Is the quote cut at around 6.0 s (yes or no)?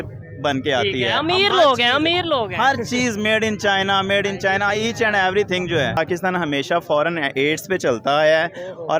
yes